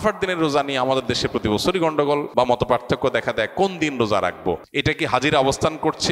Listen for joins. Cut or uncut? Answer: cut